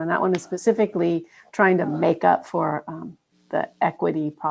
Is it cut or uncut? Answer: uncut